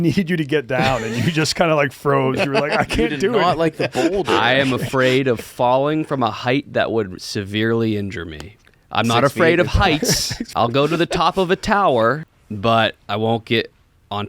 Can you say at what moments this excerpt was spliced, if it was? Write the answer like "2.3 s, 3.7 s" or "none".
10.5 s, 12.2 s